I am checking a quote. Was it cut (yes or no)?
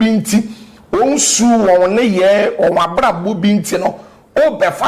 no